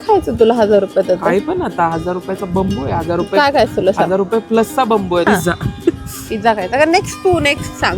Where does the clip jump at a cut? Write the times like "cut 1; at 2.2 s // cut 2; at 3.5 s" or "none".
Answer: cut 1; at 5.3 s